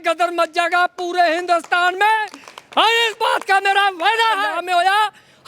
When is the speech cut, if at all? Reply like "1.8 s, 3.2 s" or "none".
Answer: 4.5 s